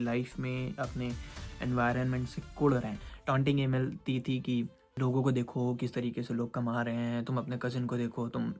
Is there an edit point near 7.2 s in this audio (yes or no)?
no